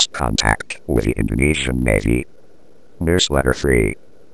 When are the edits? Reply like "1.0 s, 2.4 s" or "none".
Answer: 3.0 s